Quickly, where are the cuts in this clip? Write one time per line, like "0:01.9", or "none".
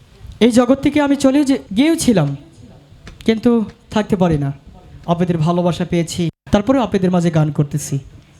0:01.6

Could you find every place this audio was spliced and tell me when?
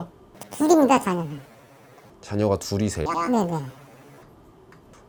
none

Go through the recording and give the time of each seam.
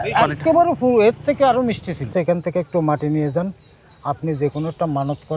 0:02.1

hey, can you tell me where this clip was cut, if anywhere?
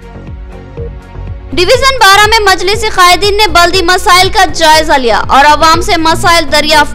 0:01.2

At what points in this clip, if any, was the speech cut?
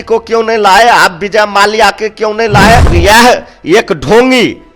0:02.9

